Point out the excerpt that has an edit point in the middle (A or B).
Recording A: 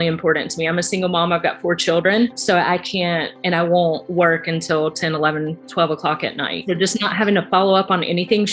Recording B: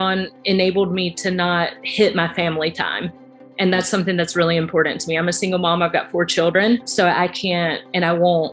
A